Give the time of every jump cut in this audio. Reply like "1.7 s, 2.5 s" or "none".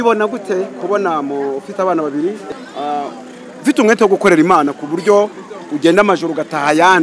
2.5 s

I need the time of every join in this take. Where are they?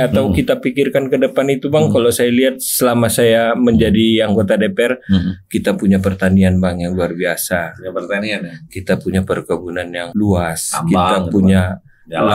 10.0 s

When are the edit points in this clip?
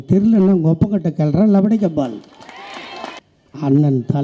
3.2 s

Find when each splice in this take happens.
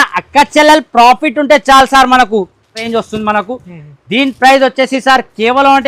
2.8 s

